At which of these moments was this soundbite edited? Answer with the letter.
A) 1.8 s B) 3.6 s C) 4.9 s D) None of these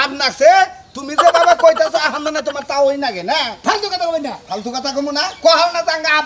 D